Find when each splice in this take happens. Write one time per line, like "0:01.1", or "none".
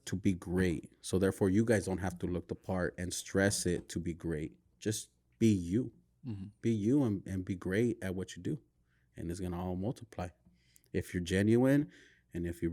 none